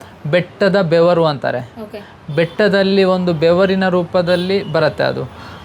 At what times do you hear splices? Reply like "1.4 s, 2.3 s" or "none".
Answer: none